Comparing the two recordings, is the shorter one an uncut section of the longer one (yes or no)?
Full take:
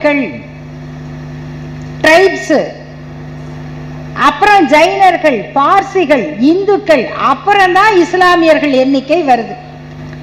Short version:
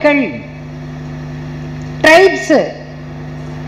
yes